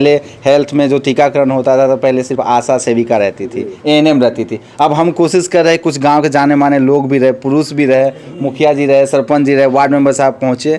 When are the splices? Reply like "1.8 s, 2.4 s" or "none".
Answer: none